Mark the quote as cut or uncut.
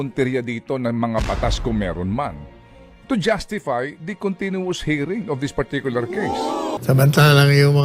cut